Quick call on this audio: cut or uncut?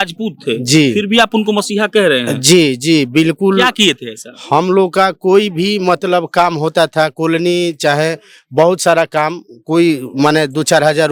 uncut